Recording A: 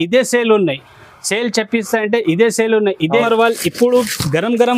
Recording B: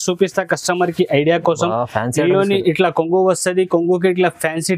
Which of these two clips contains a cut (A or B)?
A